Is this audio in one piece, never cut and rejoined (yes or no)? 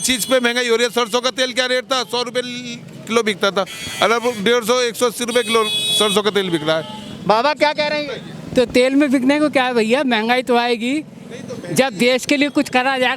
yes